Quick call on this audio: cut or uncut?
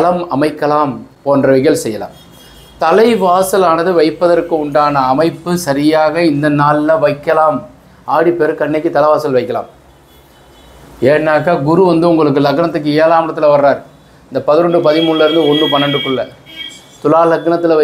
uncut